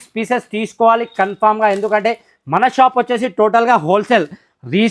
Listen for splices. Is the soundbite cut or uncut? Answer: uncut